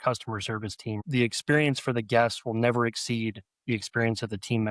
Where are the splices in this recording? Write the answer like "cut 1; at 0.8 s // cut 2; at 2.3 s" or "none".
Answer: cut 1; at 1.0 s